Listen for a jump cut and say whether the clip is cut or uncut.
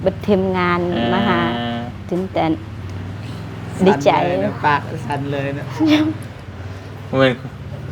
uncut